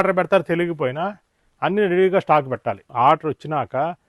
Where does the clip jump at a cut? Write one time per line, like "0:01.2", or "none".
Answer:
0:02.9